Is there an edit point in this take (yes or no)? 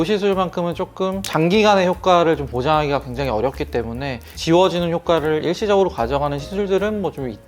no